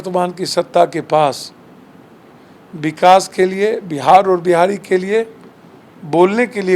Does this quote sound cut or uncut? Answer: uncut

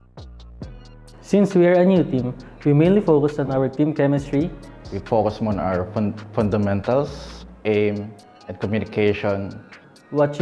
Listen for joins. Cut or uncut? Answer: cut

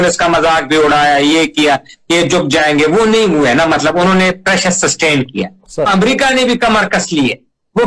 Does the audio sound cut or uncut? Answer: cut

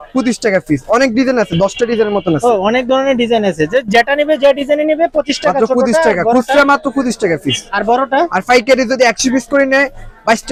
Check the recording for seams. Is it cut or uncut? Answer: uncut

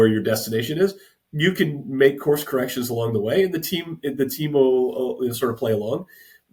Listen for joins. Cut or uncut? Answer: uncut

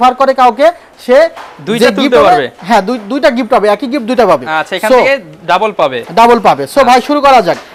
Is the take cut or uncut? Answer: uncut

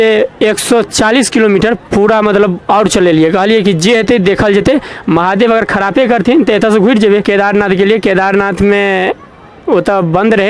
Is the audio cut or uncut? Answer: cut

